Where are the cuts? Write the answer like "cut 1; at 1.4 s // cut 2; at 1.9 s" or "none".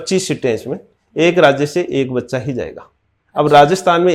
none